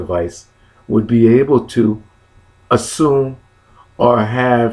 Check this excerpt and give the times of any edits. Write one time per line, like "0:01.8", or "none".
none